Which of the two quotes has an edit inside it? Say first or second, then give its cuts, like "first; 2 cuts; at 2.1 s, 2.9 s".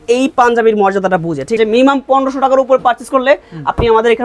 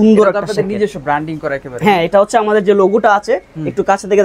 first; 1 cut; at 1.6 s